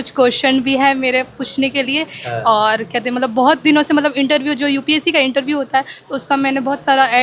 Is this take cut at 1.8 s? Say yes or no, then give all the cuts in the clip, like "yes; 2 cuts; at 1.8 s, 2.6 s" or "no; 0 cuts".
no; 0 cuts